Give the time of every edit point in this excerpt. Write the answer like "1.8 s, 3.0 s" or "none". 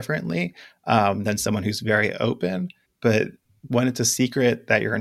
2.8 s, 3.5 s

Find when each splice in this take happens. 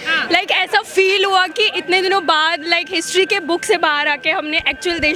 none

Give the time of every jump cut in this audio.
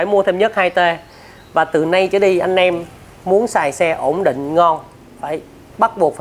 none

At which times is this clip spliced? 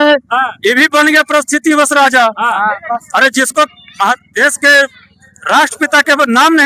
none

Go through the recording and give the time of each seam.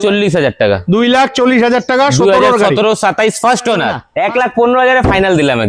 4.0 s

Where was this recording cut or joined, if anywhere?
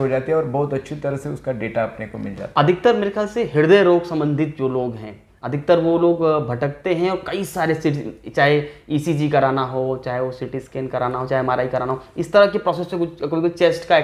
none

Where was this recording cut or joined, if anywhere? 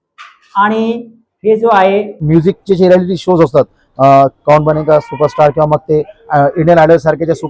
2.2 s

